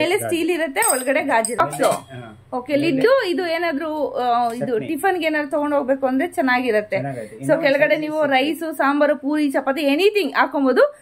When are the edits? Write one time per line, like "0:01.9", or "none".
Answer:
0:01.6

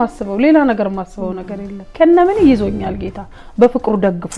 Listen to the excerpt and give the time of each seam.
0:01.9

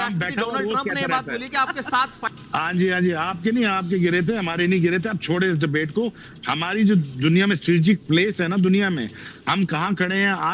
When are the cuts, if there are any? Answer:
0:02.2

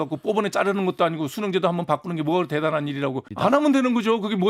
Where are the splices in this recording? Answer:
0:03.3

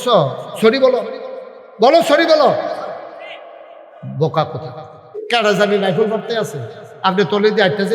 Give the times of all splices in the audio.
0:05.1

